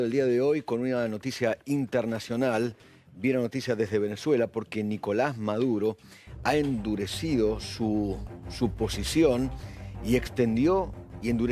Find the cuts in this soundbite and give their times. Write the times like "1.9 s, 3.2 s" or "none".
none